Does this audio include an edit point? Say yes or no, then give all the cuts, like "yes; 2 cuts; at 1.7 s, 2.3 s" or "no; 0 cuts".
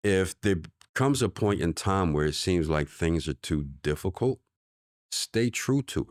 no; 0 cuts